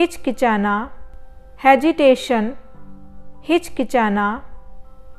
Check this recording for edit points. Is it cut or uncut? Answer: uncut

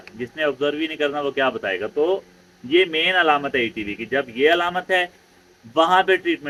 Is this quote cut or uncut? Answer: uncut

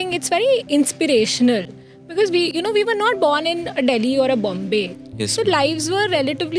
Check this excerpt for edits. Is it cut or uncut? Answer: uncut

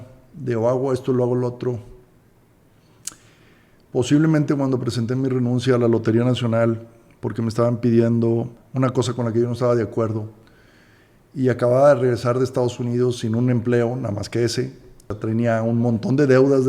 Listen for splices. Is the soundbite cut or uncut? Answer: cut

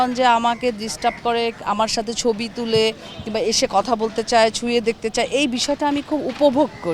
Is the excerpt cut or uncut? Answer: cut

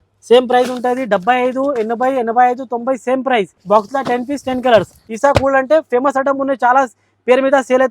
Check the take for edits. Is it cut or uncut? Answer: cut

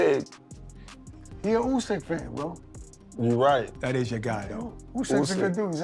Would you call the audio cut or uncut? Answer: uncut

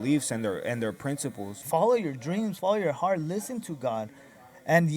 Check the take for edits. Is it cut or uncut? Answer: cut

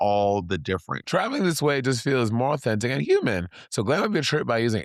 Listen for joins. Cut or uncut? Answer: cut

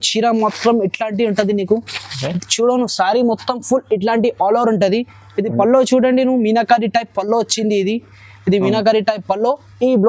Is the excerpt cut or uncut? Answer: uncut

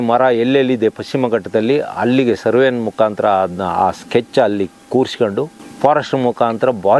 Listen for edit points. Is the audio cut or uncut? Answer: uncut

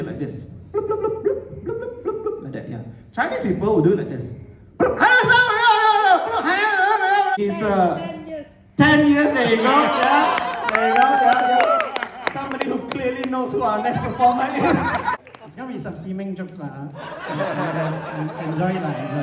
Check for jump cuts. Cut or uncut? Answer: cut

